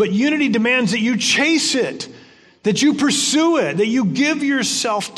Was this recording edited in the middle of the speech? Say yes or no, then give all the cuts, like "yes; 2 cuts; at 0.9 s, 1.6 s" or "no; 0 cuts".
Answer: no; 0 cuts